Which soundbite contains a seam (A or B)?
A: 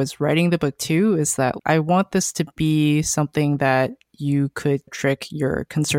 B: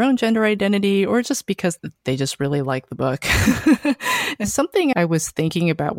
B